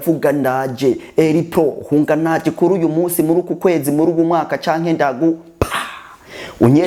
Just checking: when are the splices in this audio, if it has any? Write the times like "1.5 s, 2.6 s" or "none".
none